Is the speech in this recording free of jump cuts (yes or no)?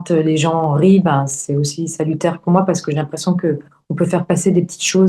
yes